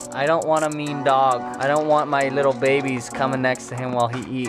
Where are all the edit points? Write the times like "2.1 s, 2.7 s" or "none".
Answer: 1.5 s